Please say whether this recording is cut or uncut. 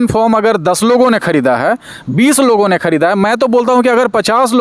uncut